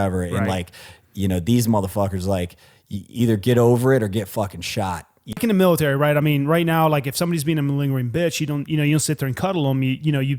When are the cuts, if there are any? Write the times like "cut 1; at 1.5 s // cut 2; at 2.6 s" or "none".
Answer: cut 1; at 5.4 s

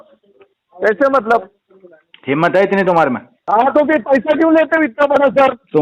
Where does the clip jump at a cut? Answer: cut 1; at 3.3 s

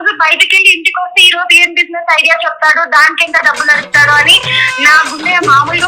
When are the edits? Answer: none

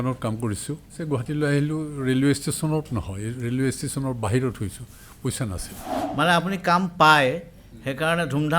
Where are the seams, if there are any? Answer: cut 1; at 1.0 s // cut 2; at 6.0 s

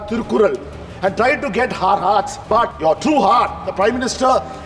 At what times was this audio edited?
cut 1; at 2.5 s

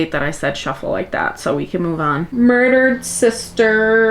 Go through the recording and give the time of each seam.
cut 1; at 2.3 s

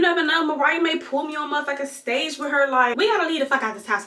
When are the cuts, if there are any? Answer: cut 1; at 2.9 s

